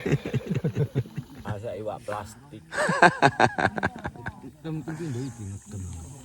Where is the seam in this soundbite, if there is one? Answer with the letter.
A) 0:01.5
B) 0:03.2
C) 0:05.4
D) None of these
A